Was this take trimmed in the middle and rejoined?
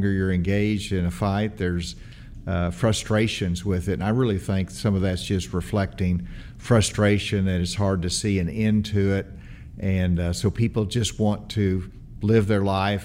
no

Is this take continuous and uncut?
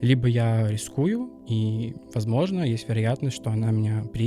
no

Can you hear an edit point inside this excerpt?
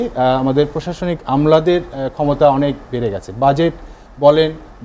no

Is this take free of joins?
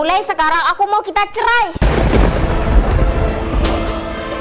yes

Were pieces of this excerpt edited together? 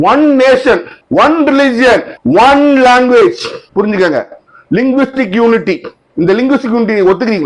no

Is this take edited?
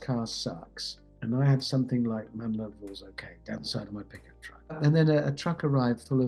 yes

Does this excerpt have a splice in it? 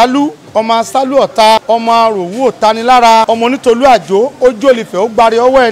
yes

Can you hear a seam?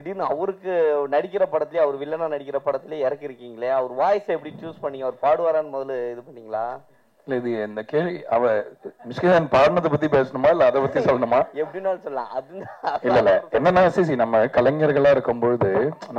no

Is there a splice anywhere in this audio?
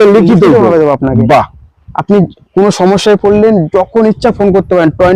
no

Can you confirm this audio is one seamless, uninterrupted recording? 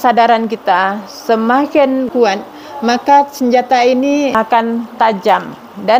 no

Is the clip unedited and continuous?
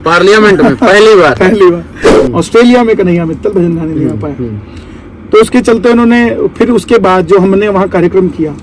no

